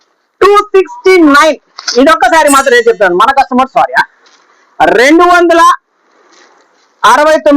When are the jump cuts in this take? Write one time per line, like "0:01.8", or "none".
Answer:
none